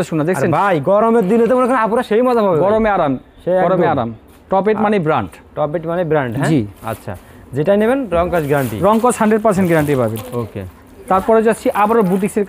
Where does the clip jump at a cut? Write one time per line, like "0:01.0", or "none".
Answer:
none